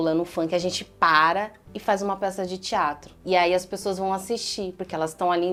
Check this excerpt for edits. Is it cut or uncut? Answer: uncut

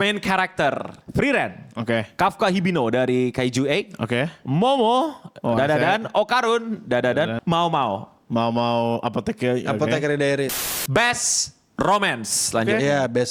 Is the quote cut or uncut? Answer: cut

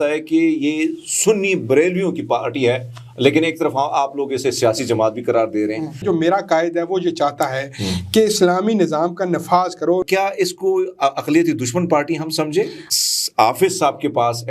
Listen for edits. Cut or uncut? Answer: cut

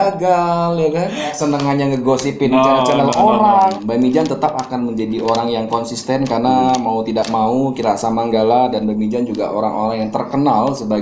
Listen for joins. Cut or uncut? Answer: cut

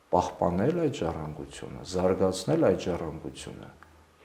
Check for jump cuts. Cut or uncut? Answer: uncut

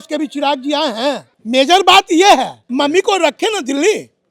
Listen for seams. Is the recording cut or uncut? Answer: cut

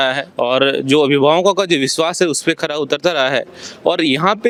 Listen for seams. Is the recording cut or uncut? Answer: uncut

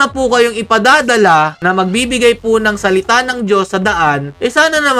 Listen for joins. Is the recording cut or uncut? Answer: uncut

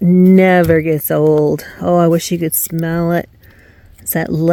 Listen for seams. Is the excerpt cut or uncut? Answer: uncut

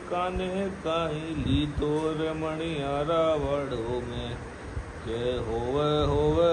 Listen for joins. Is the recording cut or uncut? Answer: uncut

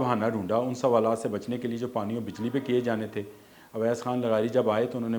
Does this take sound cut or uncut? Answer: uncut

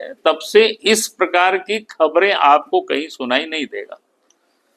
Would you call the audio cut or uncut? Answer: uncut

